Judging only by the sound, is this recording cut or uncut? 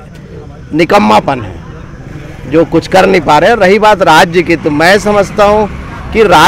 uncut